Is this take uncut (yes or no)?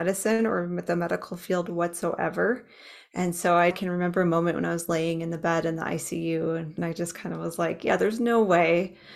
no